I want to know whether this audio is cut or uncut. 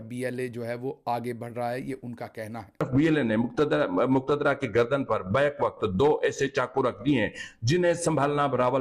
uncut